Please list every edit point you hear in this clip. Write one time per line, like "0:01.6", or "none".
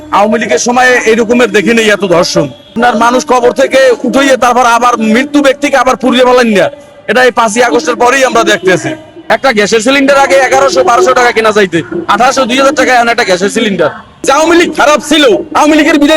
0:02.7
0:09.1
0:14.3

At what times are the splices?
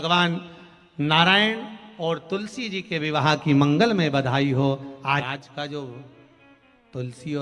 0:05.2

